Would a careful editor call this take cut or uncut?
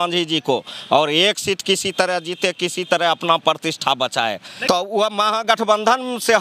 cut